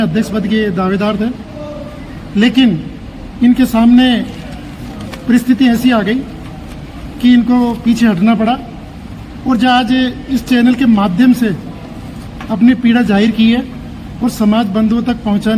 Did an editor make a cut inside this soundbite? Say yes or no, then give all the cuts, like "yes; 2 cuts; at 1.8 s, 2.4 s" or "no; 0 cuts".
no; 0 cuts